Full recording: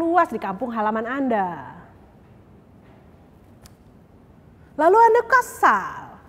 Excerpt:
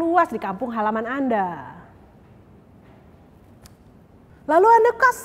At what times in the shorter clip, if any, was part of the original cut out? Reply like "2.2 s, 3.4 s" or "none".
4.3 s